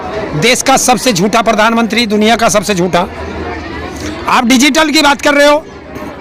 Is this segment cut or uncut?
uncut